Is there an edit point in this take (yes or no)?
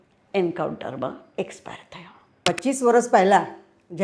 yes